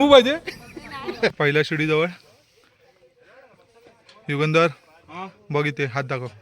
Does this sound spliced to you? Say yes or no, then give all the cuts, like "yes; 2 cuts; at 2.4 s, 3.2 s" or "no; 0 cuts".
yes; 1 cut; at 1.3 s